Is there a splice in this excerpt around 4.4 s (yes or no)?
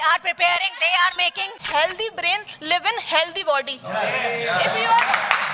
no